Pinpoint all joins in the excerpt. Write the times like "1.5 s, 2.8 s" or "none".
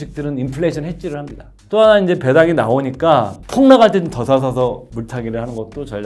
1.5 s, 3.4 s, 4.9 s